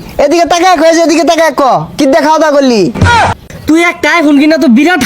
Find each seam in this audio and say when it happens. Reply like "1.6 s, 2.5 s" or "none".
3.0 s

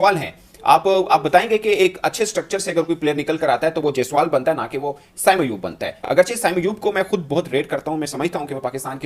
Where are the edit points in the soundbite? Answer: none

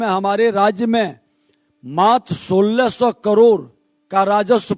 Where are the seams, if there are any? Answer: none

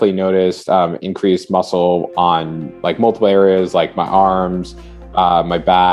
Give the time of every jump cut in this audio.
none

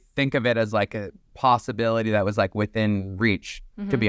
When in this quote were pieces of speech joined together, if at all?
none

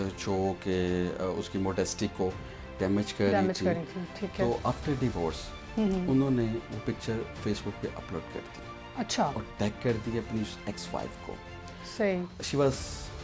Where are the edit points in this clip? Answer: none

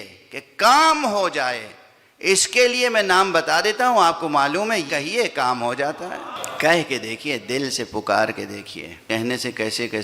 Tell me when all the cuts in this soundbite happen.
4.9 s, 6.4 s, 9.1 s

